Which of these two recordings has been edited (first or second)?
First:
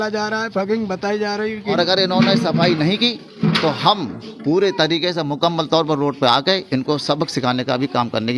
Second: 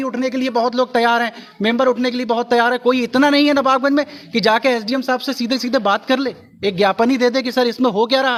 first